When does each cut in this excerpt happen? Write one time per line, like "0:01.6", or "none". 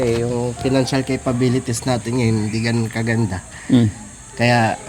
none